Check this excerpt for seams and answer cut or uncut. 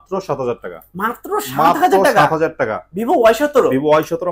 uncut